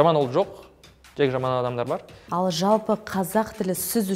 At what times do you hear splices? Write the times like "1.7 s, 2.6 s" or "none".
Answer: 2.2 s